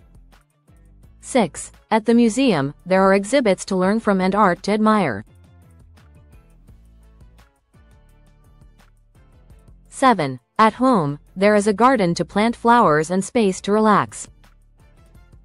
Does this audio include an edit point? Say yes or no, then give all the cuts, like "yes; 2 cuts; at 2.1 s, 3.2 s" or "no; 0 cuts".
yes; 4 cuts; at 1.3 s, 5.3 s, 9.9 s, 14.3 s